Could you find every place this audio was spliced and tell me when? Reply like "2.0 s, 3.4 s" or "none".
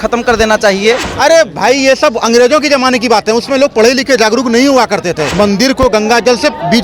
1.1 s, 5.3 s